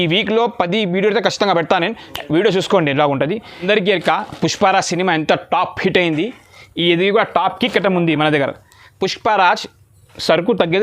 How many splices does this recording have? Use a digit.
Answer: 1